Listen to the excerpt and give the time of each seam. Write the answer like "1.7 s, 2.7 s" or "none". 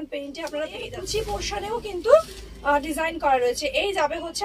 1.0 s